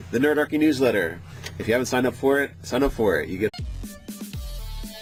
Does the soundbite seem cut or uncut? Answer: uncut